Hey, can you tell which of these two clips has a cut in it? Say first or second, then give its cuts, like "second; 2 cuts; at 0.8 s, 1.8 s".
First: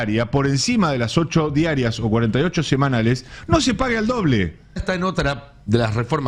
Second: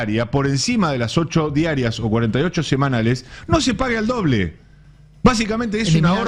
first; 1 cut; at 4.8 s